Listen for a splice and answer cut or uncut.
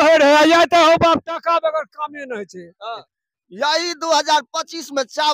cut